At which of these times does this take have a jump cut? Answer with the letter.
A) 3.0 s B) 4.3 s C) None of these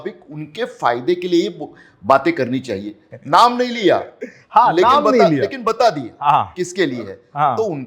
A